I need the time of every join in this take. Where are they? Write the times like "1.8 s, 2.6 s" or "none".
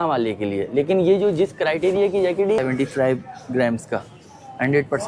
2.6 s